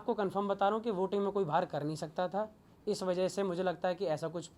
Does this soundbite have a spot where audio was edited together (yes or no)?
no